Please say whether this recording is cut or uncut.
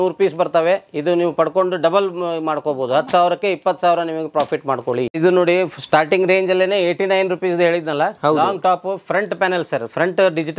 uncut